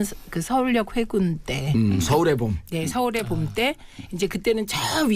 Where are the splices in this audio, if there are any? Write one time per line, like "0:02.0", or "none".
0:01.9

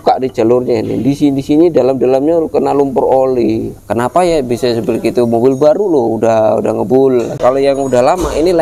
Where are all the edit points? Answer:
0:03.8
0:07.4

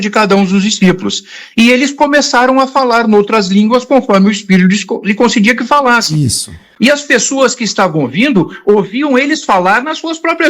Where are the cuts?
0:06.6

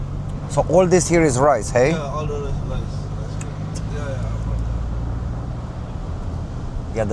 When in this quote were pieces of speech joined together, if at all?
0:03.8

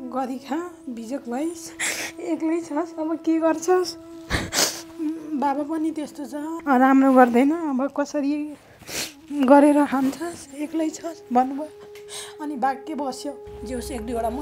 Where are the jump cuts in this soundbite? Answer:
0:06.5
0:13.5

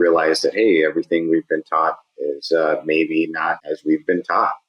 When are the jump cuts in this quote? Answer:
0:03.6

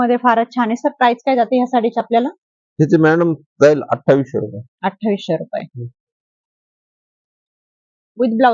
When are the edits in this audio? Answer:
none

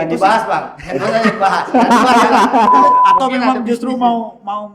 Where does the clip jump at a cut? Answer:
0:02.8

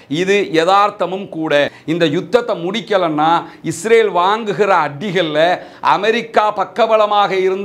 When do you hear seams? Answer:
0:01.8

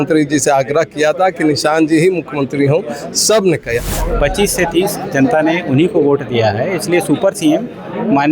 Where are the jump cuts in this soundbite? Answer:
0:03.9

